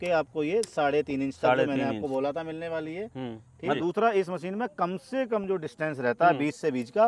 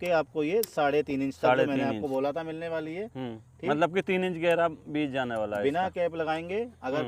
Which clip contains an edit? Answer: first; 1 cut; at 3.8 s

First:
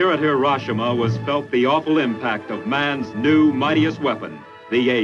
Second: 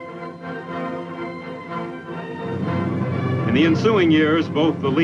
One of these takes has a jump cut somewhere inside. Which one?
first; 1 cut; at 1.2 s

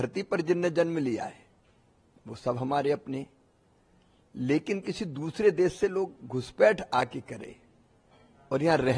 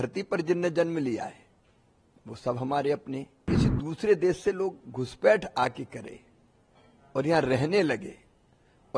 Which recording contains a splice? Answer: second; 1 cut; at 3.5 s

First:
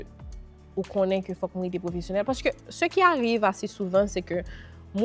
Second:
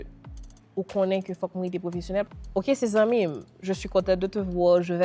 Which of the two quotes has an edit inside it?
second; 1 cut; at 2.3 s

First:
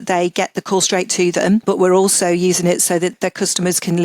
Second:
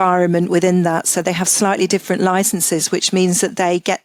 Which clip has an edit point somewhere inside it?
first; 2 cuts; at 1.6 s, 3.1 s

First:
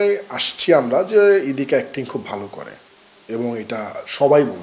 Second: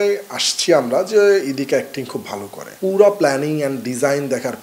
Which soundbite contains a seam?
second; 1 cut; at 2.6 s

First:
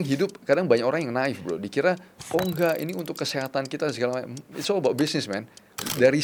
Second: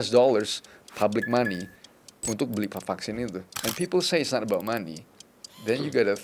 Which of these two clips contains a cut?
second; 1 cut; at 3.5 s

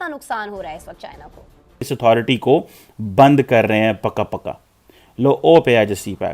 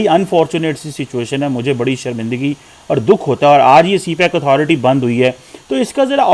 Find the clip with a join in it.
first; 1 cut; at 1.9 s

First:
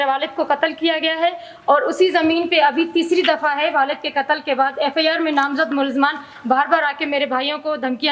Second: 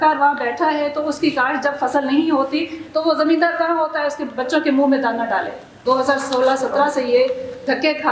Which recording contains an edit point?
second; 1 cut; at 5.8 s

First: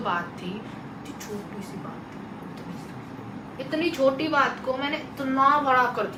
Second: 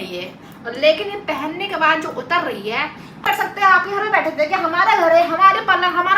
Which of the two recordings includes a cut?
second; 1 cut; at 3.2 s

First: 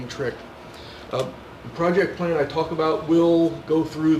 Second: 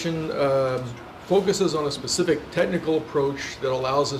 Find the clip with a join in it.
first; 1 cut; at 3.0 s

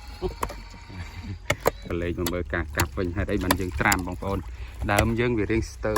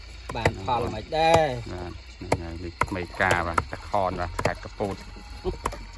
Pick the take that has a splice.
first; 1 cut; at 1.8 s

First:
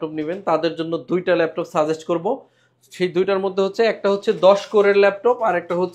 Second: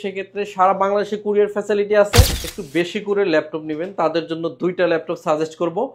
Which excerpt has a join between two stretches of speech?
second; 1 cut; at 2.4 s

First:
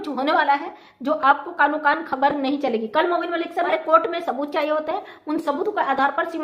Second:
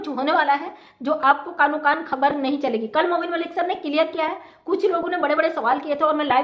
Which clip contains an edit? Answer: first; 1 cut; at 3.7 s

